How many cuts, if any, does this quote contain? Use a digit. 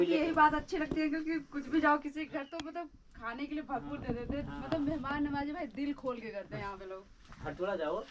0